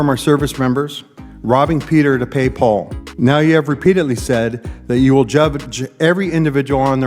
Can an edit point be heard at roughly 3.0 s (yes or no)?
yes